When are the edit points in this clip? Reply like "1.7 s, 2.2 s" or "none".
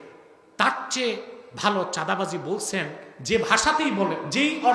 none

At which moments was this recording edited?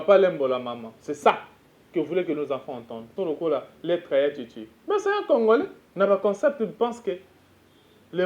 3.1 s, 5.8 s

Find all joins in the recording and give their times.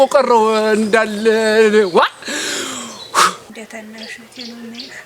3.5 s

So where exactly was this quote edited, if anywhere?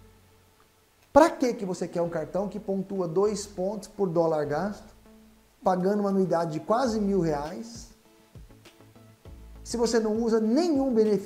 8.2 s, 9.7 s

